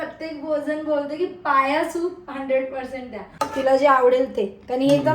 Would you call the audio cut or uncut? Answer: cut